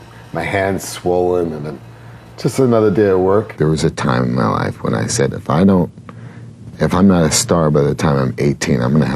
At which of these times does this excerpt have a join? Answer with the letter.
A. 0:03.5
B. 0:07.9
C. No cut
A